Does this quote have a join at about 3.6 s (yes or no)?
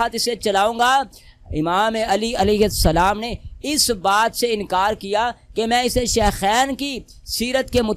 no